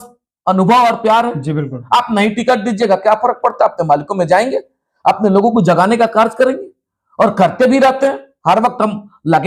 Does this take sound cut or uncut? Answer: uncut